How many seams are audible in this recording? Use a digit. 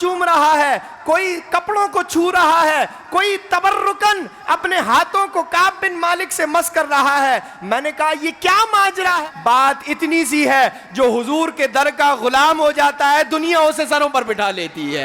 1